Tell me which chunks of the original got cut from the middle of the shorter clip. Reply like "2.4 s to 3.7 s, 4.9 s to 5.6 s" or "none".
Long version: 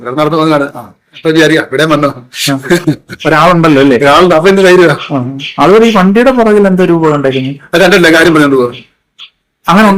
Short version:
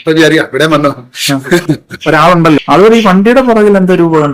3.8 s to 5.5 s